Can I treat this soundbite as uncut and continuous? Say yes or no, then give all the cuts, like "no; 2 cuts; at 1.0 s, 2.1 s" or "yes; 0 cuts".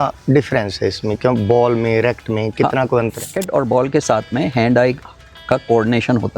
no; 1 cut; at 3.3 s